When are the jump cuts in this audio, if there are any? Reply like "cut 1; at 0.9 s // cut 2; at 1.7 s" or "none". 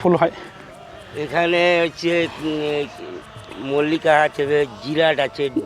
none